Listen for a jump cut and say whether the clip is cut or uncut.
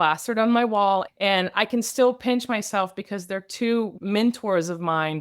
cut